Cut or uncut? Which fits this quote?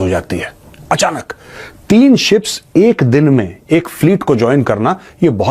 uncut